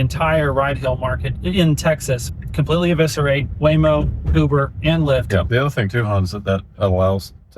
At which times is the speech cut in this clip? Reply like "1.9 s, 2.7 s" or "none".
1.3 s, 2.3 s, 5.5 s